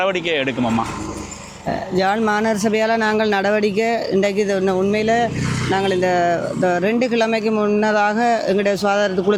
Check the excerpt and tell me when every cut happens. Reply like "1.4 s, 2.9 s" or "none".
none